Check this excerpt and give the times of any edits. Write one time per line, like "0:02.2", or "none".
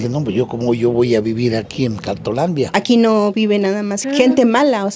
0:02.7
0:04.0